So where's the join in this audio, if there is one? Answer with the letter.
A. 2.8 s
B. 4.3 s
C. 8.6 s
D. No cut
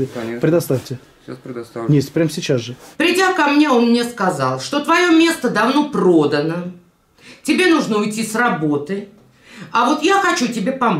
A